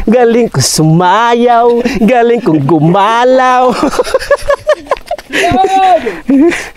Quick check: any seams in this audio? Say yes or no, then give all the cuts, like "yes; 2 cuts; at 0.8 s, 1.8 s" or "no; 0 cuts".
no; 0 cuts